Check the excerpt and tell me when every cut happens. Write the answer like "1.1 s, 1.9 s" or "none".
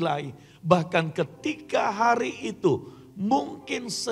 none